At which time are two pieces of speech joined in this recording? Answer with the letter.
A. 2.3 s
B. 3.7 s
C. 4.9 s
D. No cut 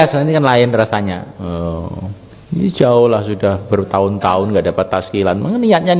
A